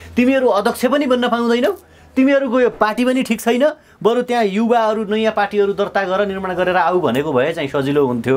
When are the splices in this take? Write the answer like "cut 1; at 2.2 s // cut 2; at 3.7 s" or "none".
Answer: none